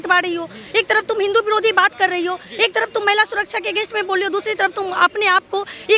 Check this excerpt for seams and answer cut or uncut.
uncut